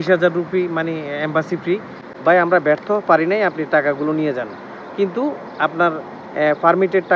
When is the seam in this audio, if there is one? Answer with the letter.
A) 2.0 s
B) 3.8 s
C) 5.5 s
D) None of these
A